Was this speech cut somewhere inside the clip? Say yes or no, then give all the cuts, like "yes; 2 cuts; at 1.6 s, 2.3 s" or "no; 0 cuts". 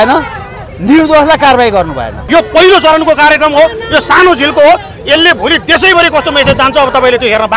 yes; 1 cut; at 2.2 s